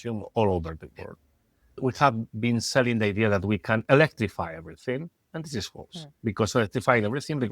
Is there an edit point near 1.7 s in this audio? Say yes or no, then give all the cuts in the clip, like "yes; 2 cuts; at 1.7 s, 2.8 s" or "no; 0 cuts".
yes; 1 cut; at 1.7 s